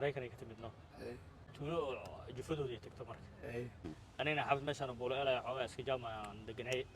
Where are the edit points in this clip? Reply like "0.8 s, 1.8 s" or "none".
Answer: 1.4 s, 3.8 s